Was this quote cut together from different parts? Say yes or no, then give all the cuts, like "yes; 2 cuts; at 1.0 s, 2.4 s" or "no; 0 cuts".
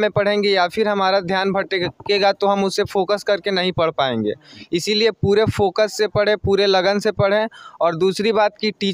no; 0 cuts